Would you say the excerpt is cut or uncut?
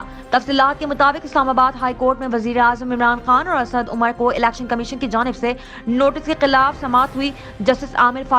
uncut